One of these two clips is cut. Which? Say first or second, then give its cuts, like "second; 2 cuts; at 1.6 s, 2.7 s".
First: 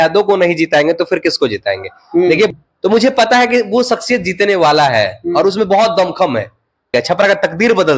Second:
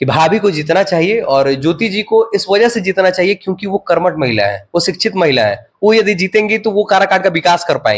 first; 2 cuts; at 2.5 s, 6.9 s